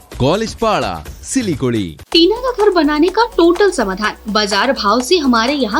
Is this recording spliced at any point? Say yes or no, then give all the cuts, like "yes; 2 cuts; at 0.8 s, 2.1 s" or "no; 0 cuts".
yes; 1 cut; at 2.0 s